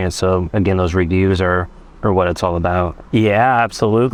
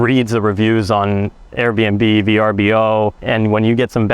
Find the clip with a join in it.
second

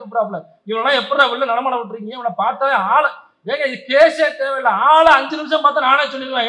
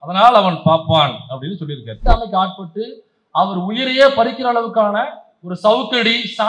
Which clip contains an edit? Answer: second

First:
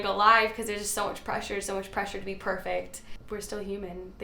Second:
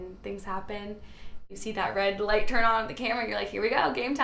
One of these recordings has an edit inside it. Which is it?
second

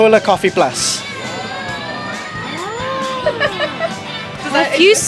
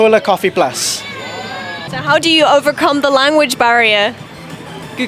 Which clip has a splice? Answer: second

